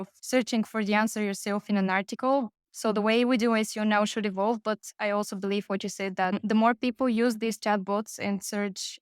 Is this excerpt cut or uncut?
uncut